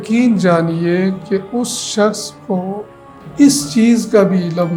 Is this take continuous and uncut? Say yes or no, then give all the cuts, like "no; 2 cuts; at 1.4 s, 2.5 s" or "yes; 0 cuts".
yes; 0 cuts